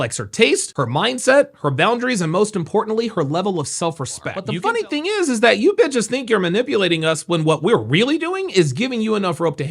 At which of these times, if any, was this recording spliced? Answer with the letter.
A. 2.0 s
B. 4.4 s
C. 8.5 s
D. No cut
B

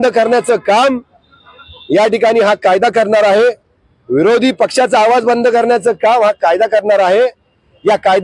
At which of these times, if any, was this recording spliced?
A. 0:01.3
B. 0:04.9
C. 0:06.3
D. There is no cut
D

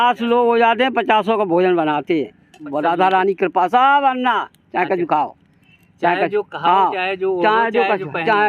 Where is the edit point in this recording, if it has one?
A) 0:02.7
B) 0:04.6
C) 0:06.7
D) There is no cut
A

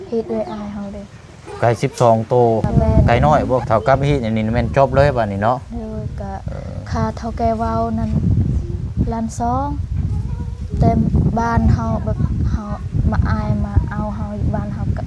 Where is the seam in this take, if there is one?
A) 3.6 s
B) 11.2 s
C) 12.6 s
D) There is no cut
A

